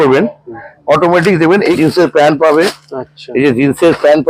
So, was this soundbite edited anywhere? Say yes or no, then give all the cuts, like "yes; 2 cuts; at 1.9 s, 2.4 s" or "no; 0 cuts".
yes; 1 cut; at 1.8 s